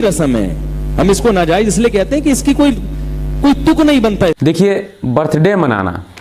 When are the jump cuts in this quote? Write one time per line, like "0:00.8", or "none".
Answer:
0:04.4

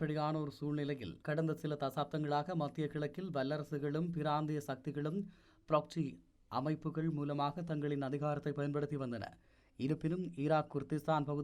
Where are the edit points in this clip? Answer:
0:01.1

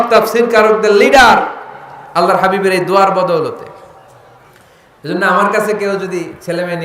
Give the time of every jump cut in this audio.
none

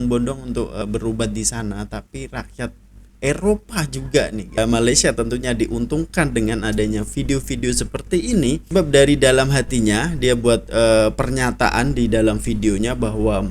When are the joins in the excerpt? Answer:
0:00.8
0:04.6
0:08.7

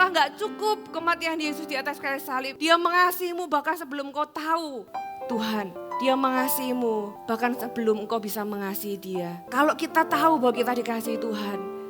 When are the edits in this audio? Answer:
0:02.5
0:04.8
0:05.8
0:07.2
0:09.4

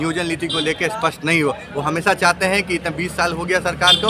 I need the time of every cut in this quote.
none

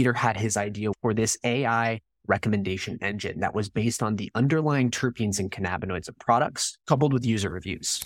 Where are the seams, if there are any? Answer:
0:00.9
0:06.7

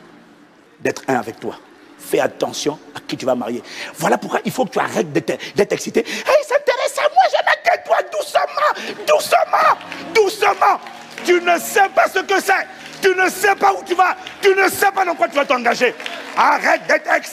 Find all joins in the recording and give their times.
none

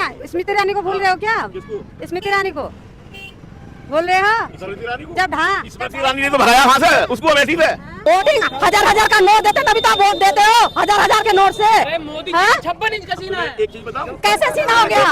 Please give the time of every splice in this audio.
0:07.9

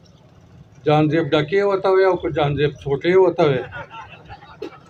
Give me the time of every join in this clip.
none

